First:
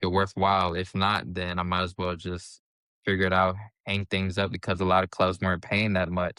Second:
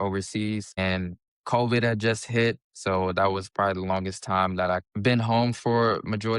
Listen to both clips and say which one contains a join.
second; 1 cut; at 4.9 s

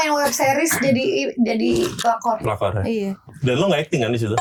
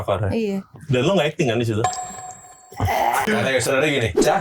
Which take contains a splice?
second; 1 cut; at 3.3 s

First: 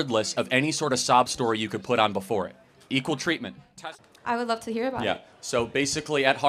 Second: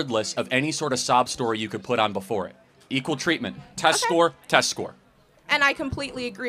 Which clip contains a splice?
first; 1 cut; at 3.8 s

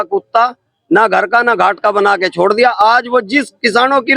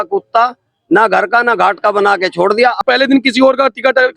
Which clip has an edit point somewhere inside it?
second; 1 cut; at 2.8 s

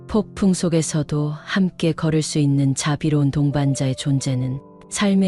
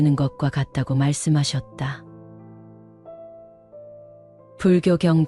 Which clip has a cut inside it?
second; 2 cuts; at 2.0 s, 4.5 s

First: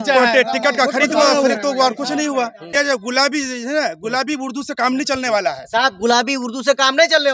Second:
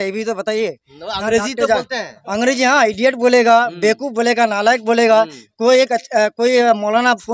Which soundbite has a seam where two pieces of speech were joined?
first; 1 cut; at 2.6 s

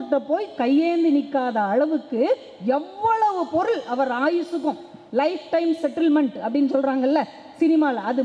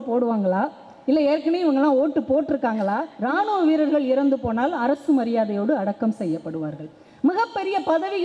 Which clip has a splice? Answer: second; 1 cut; at 3.1 s

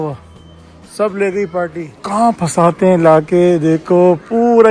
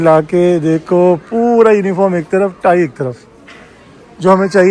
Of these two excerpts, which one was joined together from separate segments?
first; 1 cut; at 1.9 s

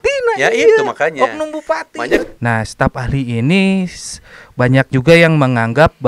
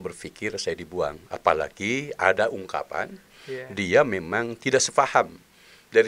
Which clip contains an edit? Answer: first; 1 cut; at 2.2 s

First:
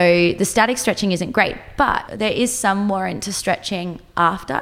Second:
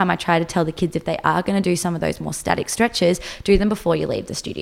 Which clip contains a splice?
first; 1 cut; at 2.1 s

